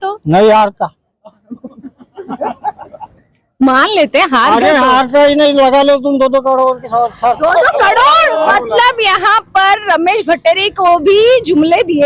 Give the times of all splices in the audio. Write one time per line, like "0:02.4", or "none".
0:08.4